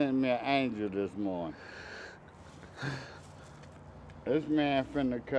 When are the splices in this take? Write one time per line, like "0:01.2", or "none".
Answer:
none